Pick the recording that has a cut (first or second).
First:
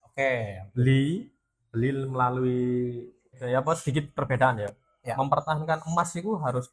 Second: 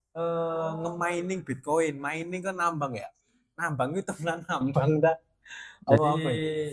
first